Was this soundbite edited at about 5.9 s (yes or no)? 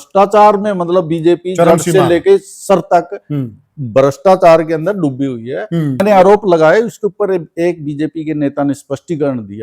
yes